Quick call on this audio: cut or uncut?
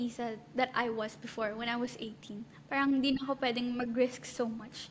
uncut